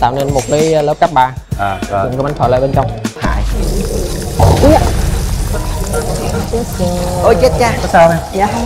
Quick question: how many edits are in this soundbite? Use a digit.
1